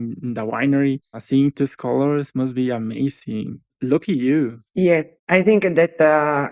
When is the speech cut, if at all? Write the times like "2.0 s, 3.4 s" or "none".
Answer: none